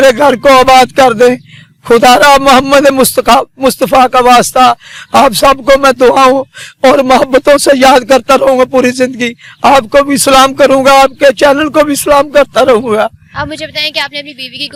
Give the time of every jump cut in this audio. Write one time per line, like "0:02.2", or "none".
none